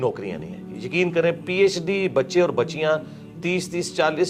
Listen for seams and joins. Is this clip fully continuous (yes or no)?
yes